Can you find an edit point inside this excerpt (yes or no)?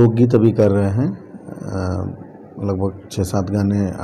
no